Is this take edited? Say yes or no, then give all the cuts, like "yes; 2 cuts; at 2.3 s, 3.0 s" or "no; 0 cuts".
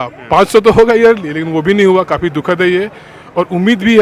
no; 0 cuts